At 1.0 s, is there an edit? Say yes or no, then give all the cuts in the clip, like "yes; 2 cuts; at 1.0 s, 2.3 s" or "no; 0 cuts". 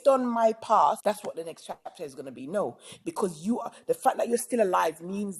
yes; 1 cut; at 1.0 s